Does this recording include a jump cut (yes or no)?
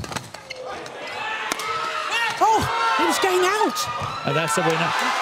no